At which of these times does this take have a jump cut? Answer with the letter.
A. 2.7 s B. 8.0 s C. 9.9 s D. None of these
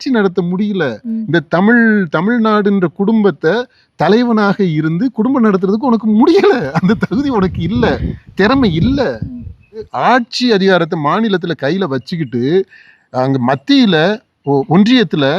C